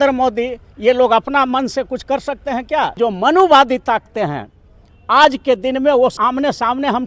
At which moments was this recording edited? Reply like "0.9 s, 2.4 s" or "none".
2.9 s, 6.2 s